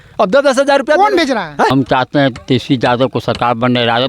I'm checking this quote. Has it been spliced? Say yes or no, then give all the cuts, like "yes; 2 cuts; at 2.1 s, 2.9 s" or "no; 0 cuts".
yes; 1 cut; at 1.7 s